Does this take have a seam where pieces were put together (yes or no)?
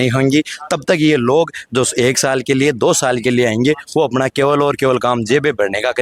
no